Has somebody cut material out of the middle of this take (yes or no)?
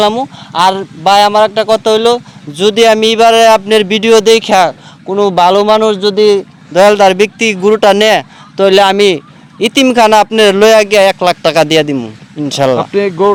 no